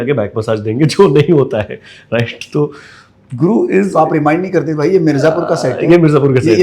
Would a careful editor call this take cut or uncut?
uncut